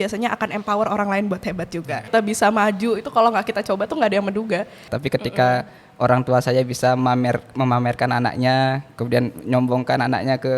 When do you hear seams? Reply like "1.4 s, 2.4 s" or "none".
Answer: 2.1 s, 4.9 s

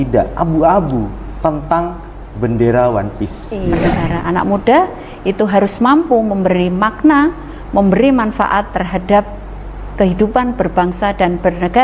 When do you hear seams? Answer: 3.9 s

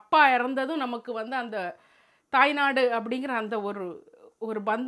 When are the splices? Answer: none

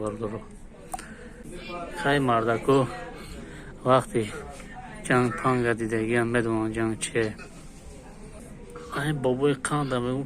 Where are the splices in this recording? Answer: 1.5 s, 8.3 s

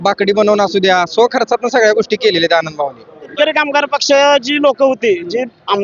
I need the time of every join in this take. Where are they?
3.3 s

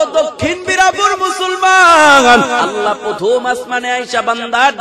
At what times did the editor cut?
2.7 s

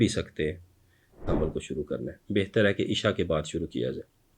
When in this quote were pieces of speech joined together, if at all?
1.2 s

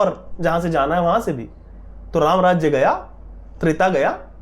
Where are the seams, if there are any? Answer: none

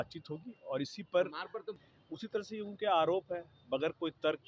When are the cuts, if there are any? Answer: 1.7 s

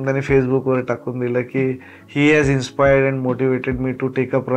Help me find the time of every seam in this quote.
none

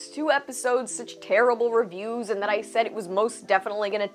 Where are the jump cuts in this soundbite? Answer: none

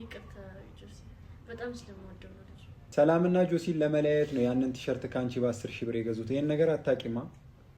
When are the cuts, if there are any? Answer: 2.7 s

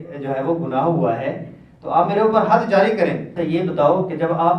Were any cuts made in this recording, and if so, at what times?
3.3 s

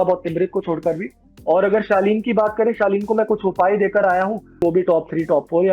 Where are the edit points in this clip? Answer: 1.3 s, 4.6 s

